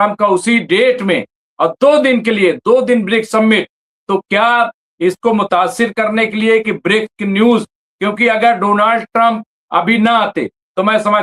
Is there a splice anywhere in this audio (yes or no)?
no